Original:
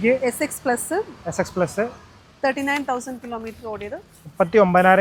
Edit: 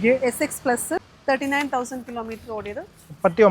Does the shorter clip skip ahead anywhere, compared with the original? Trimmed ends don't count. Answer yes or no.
yes